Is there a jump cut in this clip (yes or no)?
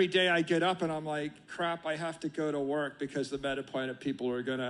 no